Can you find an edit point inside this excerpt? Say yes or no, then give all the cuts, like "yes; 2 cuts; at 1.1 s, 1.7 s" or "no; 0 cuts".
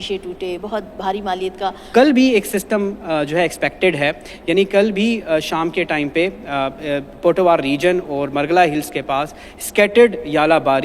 yes; 1 cut; at 1.9 s